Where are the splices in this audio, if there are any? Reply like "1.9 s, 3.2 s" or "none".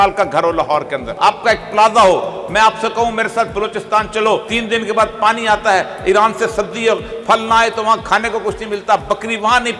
1.1 s, 4.5 s